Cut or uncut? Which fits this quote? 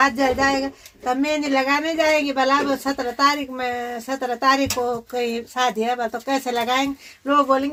uncut